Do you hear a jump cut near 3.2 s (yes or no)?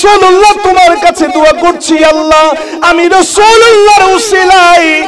no